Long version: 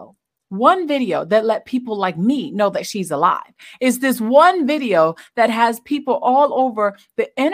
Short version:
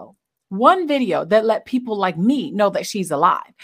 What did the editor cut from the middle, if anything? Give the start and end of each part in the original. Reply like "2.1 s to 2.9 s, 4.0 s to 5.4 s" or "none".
none